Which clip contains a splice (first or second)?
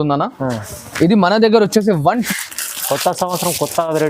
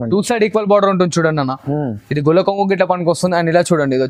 first